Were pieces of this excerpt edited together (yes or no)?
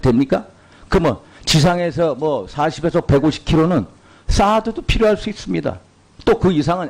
yes